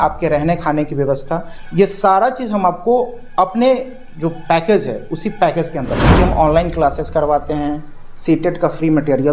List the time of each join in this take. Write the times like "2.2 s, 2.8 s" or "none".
6.0 s